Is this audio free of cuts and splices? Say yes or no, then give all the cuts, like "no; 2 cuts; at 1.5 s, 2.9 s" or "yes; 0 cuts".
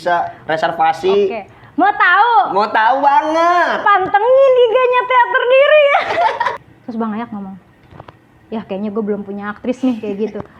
no; 1 cut; at 6.7 s